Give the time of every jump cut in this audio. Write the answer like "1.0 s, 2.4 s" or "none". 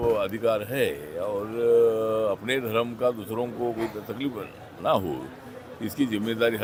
none